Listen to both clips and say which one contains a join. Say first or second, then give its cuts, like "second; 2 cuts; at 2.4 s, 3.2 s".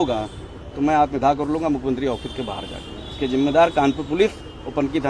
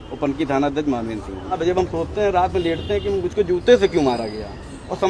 second; 1 cut; at 1.6 s